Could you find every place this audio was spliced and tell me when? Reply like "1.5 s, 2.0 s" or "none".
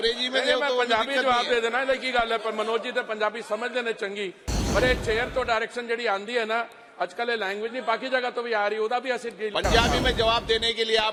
none